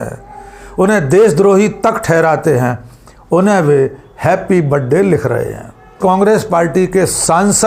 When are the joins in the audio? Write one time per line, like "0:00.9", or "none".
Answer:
0:05.9